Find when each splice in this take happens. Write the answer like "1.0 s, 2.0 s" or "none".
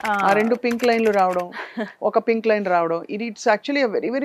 none